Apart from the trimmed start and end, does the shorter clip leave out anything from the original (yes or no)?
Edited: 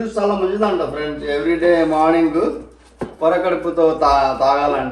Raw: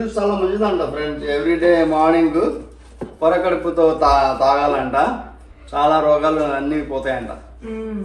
no